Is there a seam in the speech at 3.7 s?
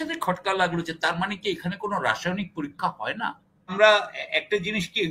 yes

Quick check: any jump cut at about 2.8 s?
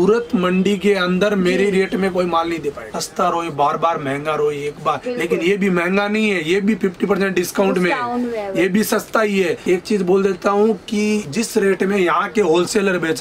yes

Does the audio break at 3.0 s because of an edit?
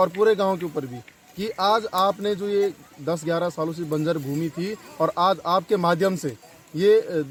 no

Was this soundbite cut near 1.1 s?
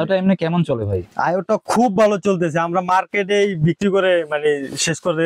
yes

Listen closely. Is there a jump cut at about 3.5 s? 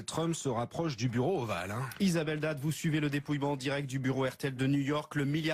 yes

